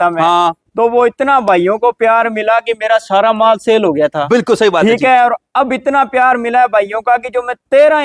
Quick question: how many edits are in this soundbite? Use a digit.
0